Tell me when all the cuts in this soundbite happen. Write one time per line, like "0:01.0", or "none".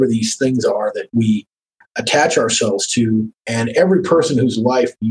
0:03.4